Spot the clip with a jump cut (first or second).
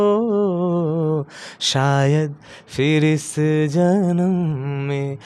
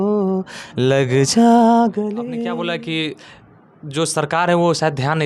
second